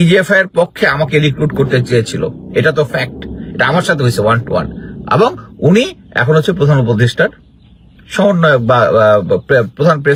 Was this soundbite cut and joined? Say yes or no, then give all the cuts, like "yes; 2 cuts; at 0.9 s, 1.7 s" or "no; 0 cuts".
no; 0 cuts